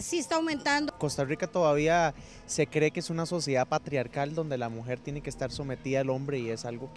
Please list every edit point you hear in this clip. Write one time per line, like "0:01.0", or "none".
0:00.9